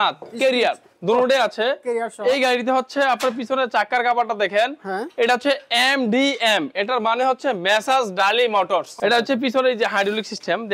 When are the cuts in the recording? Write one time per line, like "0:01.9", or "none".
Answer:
0:08.9